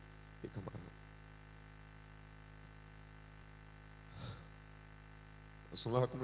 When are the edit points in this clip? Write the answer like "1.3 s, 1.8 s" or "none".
3.4 s